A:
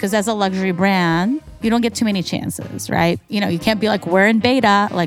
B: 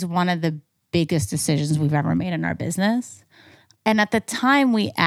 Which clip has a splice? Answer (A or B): A